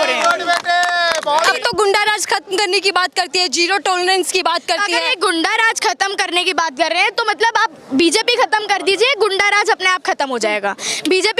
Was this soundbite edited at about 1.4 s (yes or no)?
yes